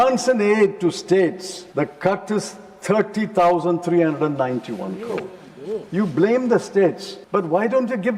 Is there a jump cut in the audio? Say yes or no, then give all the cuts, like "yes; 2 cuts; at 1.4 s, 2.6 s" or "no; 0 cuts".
yes; 2 cuts; at 1.5 s, 7.1 s